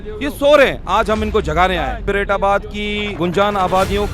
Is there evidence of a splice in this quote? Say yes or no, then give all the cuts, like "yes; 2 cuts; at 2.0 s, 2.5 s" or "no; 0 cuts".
yes; 2 cuts; at 2.0 s, 3.2 s